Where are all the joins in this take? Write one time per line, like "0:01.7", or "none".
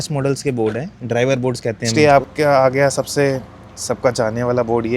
0:01.9